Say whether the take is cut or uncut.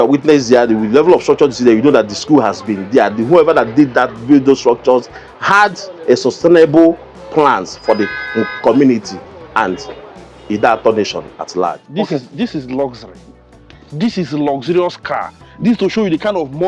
cut